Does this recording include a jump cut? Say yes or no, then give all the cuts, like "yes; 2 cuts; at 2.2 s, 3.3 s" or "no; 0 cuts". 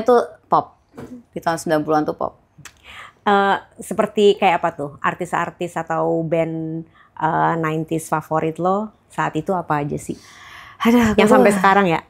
no; 0 cuts